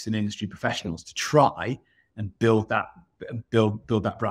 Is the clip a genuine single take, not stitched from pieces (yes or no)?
yes